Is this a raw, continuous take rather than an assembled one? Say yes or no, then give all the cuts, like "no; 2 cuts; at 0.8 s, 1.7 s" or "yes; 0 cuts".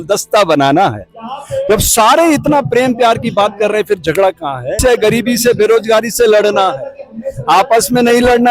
no; 1 cut; at 4.8 s